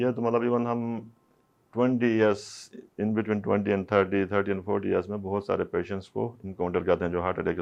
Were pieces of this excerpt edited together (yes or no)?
no